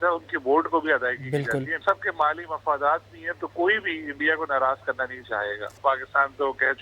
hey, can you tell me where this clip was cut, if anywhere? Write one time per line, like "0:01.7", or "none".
0:01.8
0:05.8